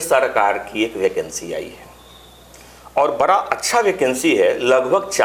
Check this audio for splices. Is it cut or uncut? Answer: uncut